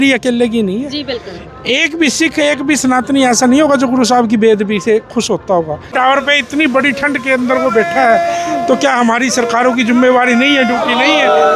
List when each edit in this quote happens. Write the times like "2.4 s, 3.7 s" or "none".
5.9 s